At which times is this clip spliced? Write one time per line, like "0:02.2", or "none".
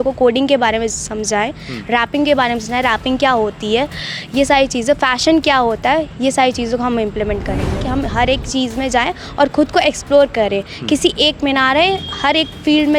0:07.8

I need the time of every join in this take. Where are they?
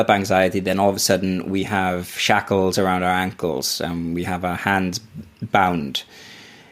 none

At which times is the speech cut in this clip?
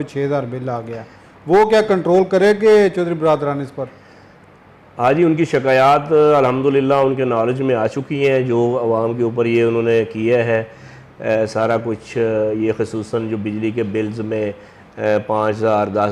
none

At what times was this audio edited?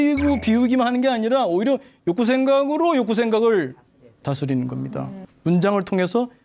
0:05.2

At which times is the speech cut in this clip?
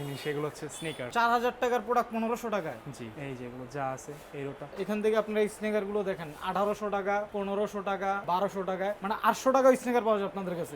0:01.0
0:03.1
0:04.6

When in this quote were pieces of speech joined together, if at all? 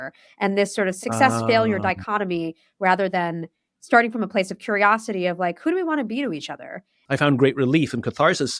0:01.0
0:06.9

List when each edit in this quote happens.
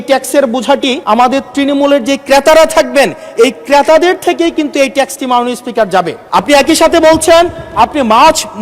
0:01.0
0:06.2

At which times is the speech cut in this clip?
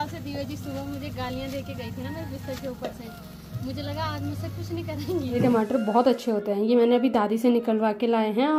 0:05.4

